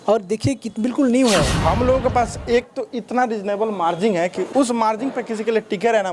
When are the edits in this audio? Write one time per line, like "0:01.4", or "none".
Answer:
0:01.5
0:04.4